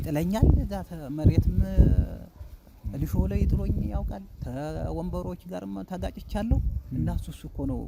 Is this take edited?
no; 0 cuts

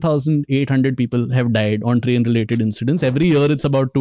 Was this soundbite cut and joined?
no; 0 cuts

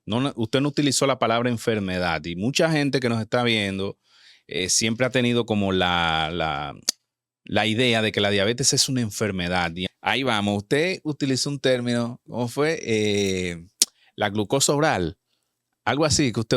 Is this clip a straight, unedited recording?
no; 1 cut; at 9.8 s

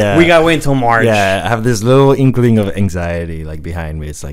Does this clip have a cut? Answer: no; 0 cuts

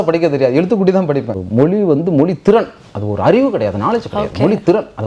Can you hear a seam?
yes; 1 cut; at 1.4 s

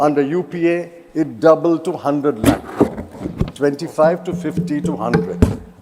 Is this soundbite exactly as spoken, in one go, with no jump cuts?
yes; 0 cuts

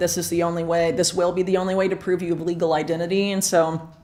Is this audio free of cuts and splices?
yes; 0 cuts

